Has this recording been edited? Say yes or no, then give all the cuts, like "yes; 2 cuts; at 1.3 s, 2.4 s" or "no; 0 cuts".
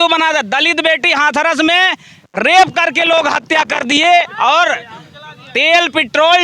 no; 0 cuts